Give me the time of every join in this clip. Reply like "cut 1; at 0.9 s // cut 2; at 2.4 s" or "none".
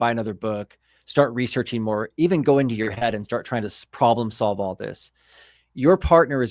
none